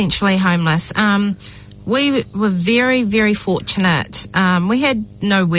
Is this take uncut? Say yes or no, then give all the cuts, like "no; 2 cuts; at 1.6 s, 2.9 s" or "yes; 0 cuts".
yes; 0 cuts